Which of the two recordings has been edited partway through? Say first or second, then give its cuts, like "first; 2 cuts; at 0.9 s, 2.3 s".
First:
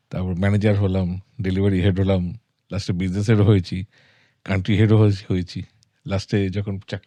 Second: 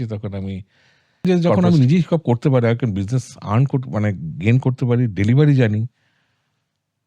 second; 1 cut; at 1.3 s